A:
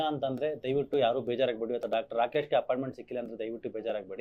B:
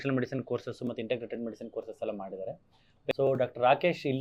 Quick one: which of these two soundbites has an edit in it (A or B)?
B